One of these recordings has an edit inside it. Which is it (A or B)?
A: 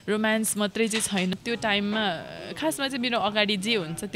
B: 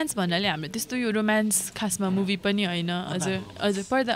A